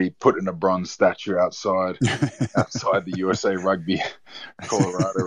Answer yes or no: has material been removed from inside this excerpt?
no